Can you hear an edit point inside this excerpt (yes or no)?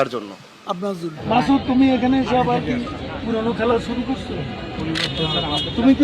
yes